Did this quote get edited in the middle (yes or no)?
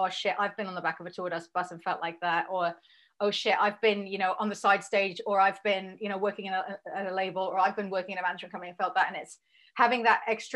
no